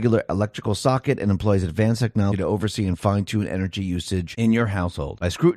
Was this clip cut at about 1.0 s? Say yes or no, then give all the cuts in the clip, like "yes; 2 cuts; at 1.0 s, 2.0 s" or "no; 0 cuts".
no; 1 cut; at 2.3 s